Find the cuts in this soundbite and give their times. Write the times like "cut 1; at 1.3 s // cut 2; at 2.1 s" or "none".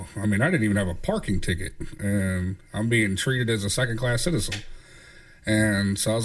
none